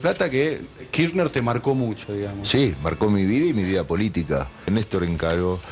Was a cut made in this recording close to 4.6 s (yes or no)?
yes